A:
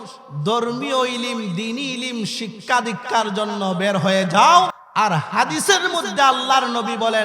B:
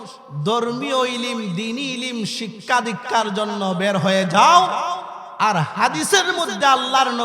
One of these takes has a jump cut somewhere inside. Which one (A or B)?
A